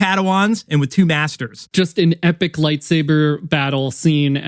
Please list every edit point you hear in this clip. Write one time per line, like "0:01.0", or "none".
0:01.6